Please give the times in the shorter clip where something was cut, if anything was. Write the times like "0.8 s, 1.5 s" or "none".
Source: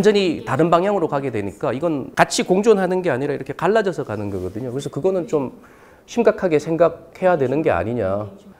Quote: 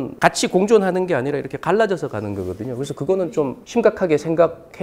3.6 s